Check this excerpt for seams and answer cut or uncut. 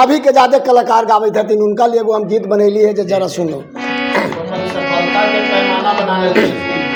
uncut